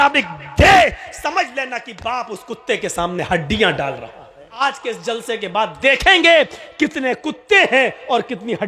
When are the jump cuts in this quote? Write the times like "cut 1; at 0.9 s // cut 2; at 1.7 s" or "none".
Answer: cut 1; at 4.6 s